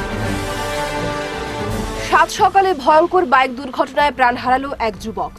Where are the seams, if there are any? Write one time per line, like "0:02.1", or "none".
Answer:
0:01.9